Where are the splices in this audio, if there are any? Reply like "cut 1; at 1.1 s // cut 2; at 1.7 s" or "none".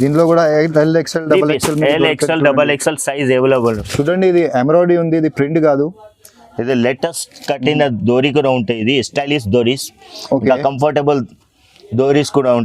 cut 1; at 3.8 s